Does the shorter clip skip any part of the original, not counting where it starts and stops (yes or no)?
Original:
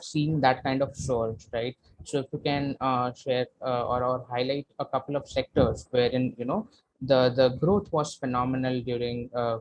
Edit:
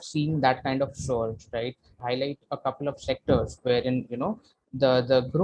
yes